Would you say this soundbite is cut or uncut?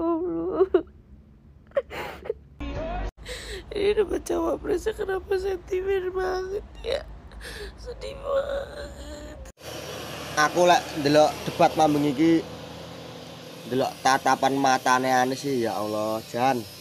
cut